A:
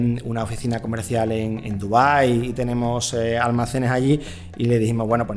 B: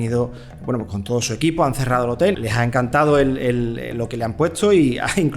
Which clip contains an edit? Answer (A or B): B